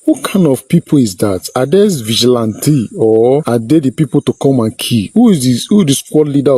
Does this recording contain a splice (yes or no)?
yes